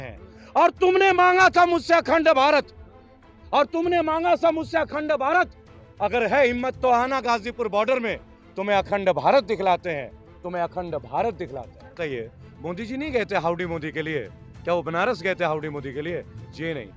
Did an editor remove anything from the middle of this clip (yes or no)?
yes